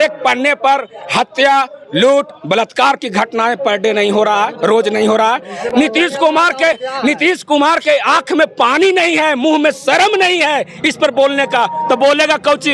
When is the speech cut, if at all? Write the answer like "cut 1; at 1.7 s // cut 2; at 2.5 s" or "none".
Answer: none